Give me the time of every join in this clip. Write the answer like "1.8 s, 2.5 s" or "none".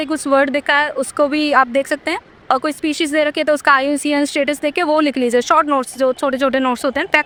none